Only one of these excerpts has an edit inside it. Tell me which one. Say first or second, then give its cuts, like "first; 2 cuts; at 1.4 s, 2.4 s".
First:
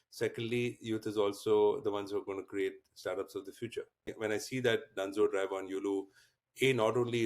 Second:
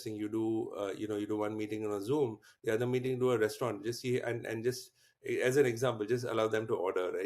first; 1 cut; at 4.4 s